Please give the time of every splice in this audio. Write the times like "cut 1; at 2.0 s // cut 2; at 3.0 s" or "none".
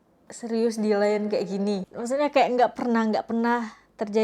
cut 1; at 1.9 s